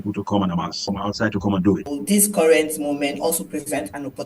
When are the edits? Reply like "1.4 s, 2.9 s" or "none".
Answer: 1.9 s